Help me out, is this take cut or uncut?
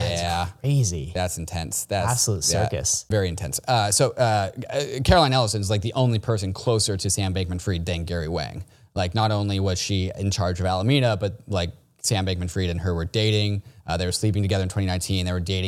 cut